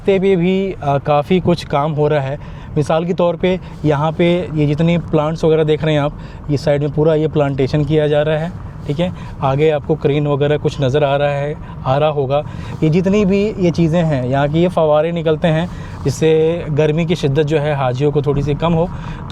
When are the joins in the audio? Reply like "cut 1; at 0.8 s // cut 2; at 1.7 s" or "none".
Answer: none